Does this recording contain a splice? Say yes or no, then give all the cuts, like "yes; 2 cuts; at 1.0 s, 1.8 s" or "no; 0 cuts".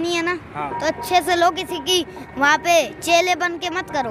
no; 0 cuts